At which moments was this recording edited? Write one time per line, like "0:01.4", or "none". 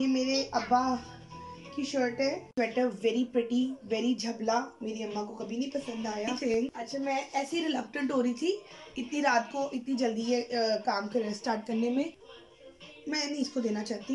0:02.5
0:06.4
0:12.2